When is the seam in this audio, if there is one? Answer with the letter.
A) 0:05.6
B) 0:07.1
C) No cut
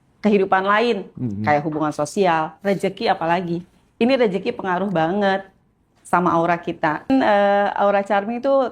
B